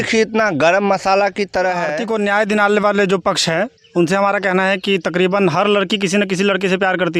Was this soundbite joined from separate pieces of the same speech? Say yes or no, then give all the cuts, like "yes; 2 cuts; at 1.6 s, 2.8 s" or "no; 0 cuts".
yes; 1 cut; at 1.9 s